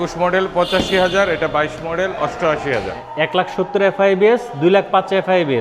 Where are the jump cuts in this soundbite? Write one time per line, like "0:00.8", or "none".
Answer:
0:03.0